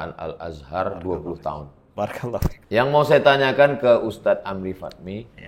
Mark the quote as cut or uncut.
cut